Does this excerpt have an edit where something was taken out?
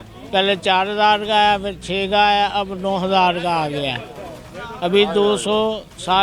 no; 0 cuts

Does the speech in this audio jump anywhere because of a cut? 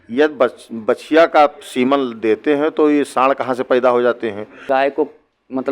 yes; 1 cut; at 4.6 s

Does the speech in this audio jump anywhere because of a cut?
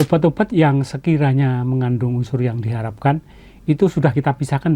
no; 0 cuts

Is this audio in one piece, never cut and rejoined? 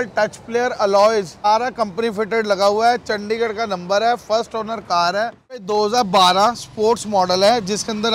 no; 2 cuts; at 1.5 s, 5.6 s

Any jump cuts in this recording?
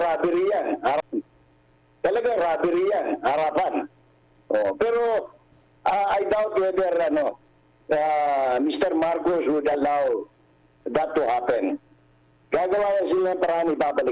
no; 0 cuts

